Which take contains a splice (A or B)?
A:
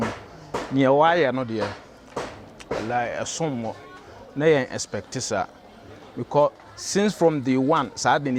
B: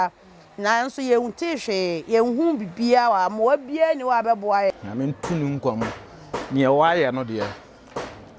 B